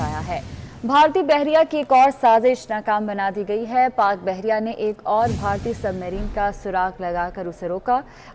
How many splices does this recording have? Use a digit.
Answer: 0